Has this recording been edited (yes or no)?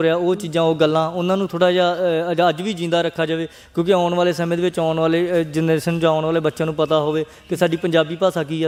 no